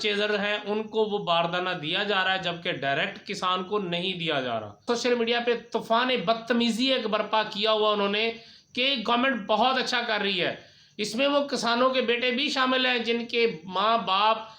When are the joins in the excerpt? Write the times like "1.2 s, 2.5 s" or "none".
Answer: 4.8 s

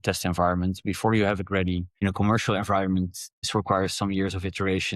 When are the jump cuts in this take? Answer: 1.9 s, 3.5 s

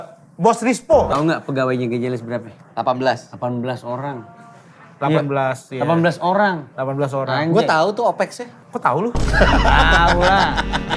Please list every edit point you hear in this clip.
1.1 s

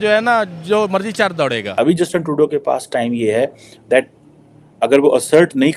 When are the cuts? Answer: 1.7 s

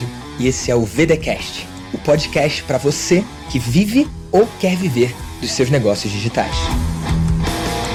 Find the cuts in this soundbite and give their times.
none

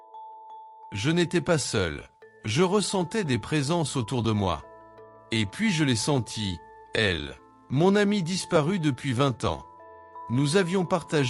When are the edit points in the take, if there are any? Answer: 0.9 s

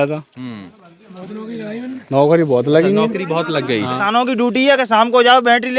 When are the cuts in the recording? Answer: 4.0 s

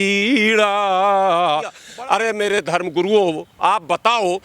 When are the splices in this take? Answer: 1.8 s

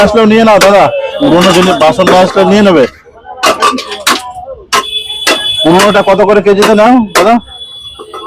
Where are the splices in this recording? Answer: 1.1 s

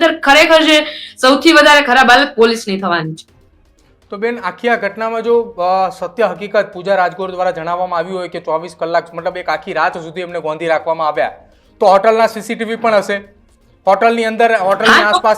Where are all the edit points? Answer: none

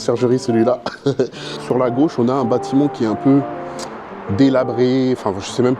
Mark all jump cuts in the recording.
1.5 s

